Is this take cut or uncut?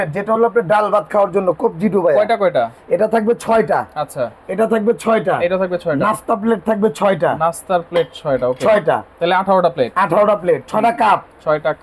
uncut